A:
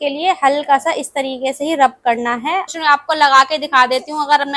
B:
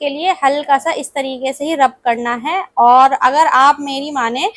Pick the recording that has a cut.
A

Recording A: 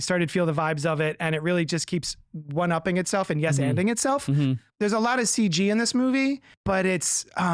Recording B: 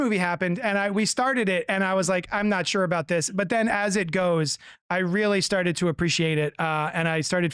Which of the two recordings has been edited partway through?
A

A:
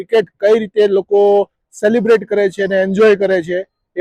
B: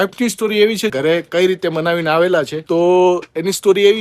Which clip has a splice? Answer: B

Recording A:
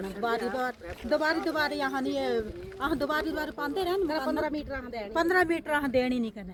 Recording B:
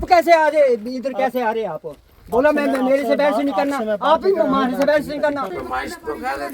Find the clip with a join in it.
B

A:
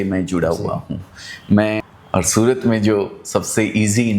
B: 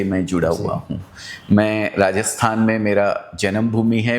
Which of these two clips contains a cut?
A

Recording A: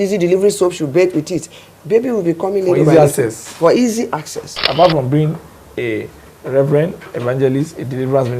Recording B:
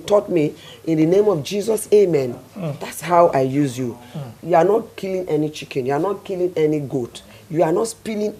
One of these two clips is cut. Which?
A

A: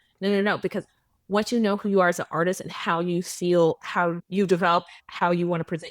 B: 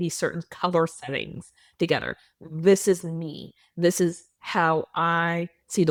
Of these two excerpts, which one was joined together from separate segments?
A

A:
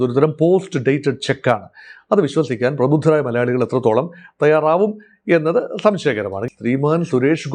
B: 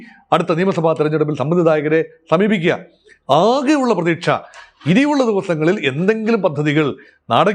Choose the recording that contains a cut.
A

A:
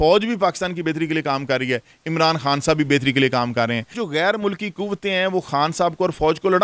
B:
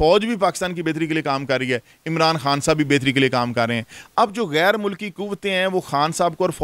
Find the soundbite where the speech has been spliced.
A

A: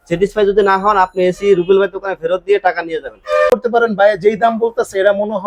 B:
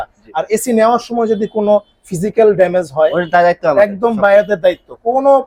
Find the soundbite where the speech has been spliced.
A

